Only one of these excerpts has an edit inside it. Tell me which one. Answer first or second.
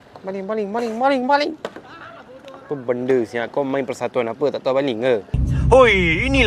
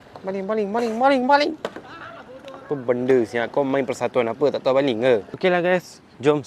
first